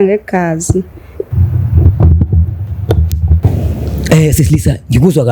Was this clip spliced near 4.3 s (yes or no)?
no